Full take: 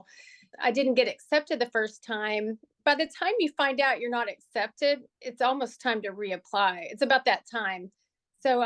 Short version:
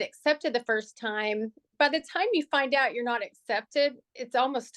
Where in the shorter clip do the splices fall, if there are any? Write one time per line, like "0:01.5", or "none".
none